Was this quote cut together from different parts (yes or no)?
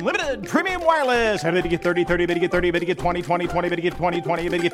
no